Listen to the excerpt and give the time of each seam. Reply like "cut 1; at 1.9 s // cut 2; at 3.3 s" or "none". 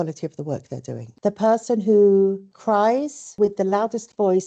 cut 1; at 1.1 s